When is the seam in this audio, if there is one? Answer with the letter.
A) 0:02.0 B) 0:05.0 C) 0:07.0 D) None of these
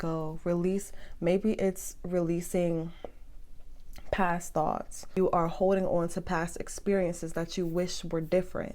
B